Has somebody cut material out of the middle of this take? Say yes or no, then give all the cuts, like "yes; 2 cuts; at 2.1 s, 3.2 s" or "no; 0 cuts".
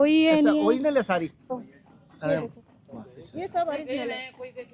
yes; 1 cut; at 1.5 s